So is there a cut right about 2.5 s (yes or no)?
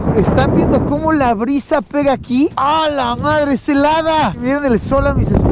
yes